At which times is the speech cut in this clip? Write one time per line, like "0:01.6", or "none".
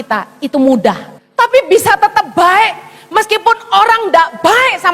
0:01.1